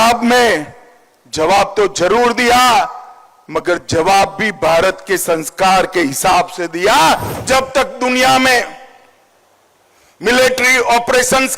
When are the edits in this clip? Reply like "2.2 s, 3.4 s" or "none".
7.3 s

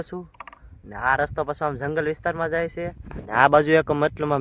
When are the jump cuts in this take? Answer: none

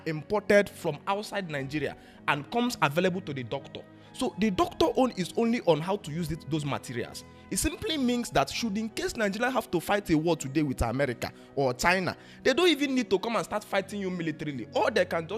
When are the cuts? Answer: none

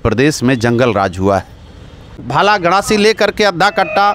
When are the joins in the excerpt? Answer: 2.2 s

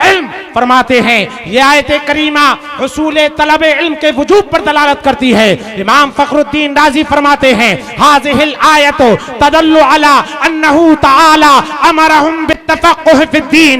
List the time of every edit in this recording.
12.6 s

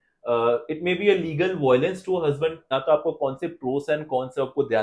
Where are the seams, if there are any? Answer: 2.7 s

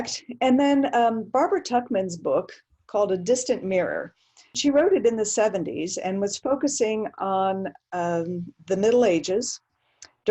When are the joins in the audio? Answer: 4.5 s

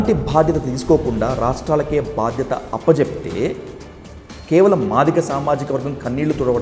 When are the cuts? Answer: none

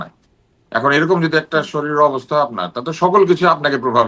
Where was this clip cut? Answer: none

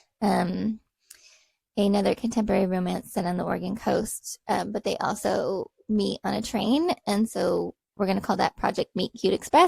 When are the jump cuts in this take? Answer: none

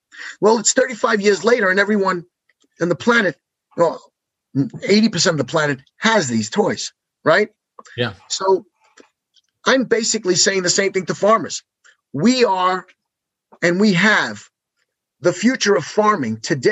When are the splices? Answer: none

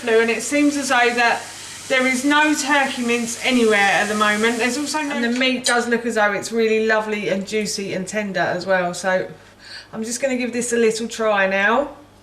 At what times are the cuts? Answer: 5.0 s

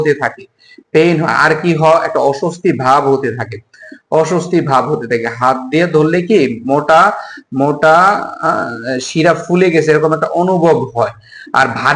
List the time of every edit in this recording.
none

